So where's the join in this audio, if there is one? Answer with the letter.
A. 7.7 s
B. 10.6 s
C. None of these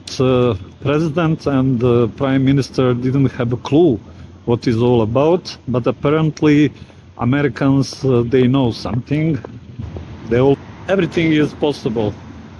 B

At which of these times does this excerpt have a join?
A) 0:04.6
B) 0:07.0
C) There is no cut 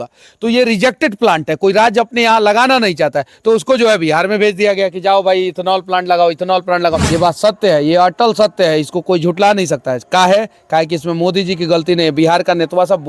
B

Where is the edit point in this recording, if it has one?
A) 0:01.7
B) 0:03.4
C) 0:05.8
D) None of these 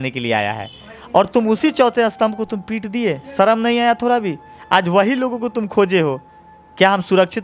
D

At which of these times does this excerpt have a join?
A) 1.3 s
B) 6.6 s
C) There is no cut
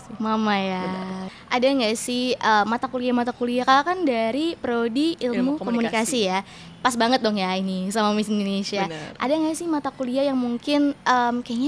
A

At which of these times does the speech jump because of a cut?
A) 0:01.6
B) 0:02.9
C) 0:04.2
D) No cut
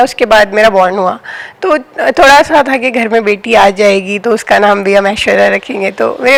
D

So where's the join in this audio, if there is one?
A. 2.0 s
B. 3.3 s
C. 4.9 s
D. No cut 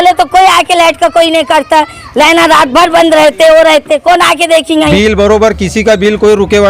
C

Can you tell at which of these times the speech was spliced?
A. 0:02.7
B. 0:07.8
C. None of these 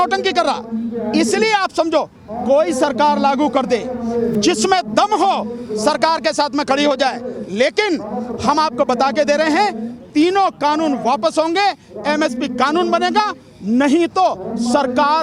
C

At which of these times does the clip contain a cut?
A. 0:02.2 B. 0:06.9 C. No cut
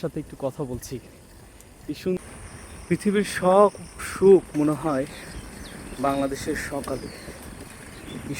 A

